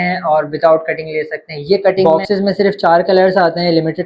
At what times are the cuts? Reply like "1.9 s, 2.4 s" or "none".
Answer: 2.1 s